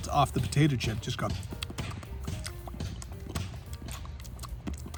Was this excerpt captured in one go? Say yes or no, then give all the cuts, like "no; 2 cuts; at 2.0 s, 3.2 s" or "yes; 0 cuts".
yes; 0 cuts